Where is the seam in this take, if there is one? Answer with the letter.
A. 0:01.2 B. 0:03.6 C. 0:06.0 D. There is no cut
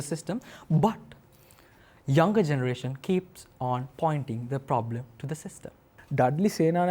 C